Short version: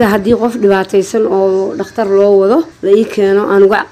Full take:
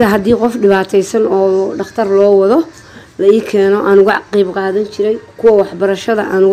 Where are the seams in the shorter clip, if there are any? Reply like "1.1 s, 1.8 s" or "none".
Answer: 2.7 s

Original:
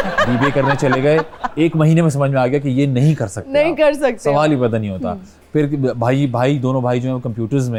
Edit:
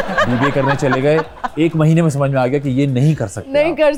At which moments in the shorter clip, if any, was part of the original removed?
none

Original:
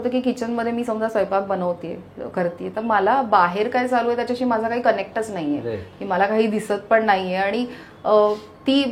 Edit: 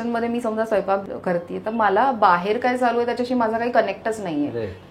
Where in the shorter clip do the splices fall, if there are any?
1.0 s

